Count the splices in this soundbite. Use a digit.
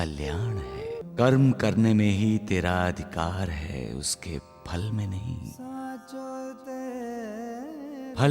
1